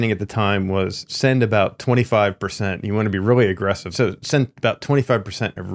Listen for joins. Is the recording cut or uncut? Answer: cut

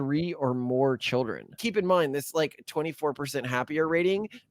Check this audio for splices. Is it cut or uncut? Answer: cut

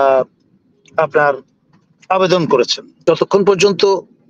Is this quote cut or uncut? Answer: cut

